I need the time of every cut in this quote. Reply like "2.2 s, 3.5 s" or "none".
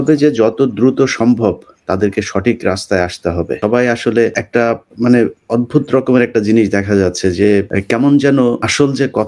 3.6 s